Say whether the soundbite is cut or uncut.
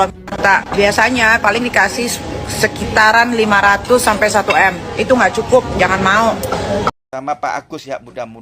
cut